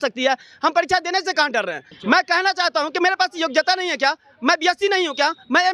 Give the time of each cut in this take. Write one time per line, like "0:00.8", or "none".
0:01.9